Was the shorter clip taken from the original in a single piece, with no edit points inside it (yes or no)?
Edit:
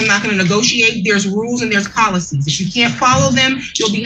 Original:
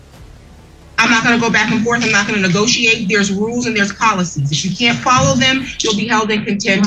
yes